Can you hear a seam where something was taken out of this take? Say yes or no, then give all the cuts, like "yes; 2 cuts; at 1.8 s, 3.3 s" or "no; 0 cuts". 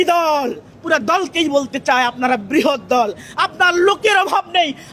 no; 0 cuts